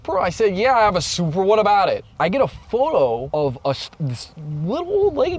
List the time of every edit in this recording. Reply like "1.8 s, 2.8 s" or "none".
2.1 s, 3.2 s